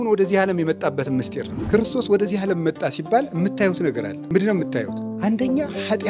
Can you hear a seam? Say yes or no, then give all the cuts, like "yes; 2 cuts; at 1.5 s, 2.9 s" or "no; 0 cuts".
yes; 3 cuts; at 1.5 s, 4.1 s, 5.0 s